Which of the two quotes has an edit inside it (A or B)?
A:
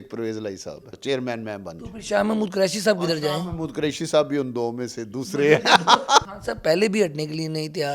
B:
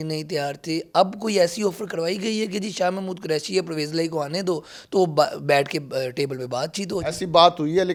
A